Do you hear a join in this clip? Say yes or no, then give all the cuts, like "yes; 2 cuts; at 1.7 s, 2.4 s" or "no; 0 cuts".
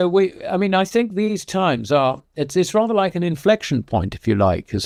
no; 0 cuts